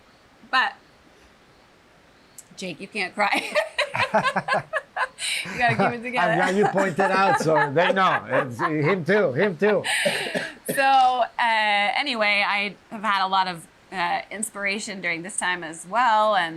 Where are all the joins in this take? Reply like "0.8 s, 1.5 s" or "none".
none